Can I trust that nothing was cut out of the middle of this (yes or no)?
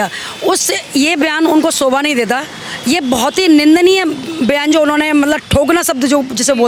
yes